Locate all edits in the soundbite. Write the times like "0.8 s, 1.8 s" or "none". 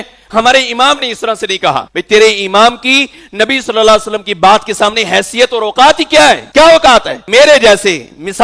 1.9 s, 6.4 s, 7.2 s